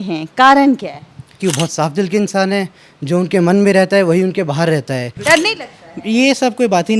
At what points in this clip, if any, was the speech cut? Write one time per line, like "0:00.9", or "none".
0:01.4
0:05.2